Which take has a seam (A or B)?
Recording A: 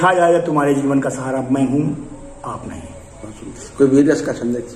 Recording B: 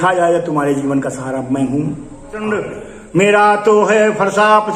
B